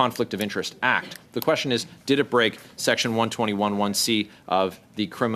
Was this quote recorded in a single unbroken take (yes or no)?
yes